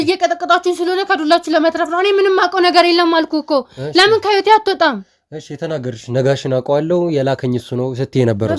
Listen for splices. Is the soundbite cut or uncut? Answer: uncut